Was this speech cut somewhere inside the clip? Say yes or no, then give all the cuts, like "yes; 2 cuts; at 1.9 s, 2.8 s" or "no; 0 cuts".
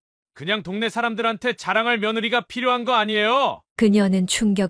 no; 0 cuts